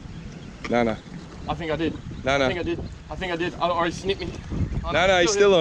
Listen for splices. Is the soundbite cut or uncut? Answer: uncut